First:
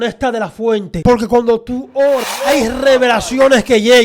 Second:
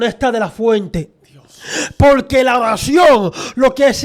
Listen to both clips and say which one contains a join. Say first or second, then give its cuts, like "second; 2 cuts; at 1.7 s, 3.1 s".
first; 2 cuts; at 0.9 s, 2.2 s